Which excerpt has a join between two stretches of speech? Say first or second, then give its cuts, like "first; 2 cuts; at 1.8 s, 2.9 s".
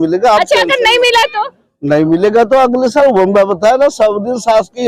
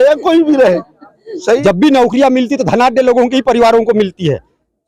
second; 1 cut; at 1.6 s